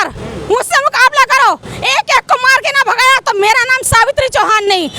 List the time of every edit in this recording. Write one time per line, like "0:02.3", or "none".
none